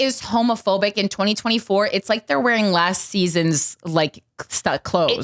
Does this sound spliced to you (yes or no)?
yes